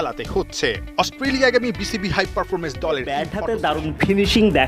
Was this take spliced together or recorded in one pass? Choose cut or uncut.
cut